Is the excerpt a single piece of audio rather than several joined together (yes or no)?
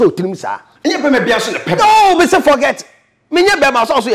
yes